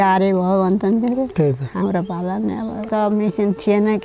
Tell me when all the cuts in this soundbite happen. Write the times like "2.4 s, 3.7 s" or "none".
2.8 s